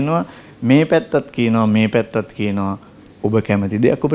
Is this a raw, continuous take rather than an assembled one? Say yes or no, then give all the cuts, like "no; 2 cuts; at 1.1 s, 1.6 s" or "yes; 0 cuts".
yes; 0 cuts